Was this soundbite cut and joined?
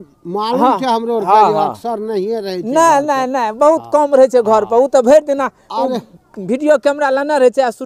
no; 0 cuts

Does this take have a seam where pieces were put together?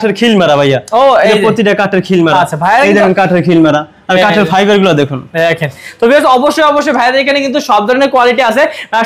no; 0 cuts

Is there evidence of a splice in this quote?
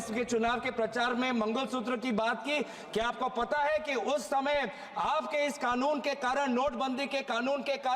no; 0 cuts

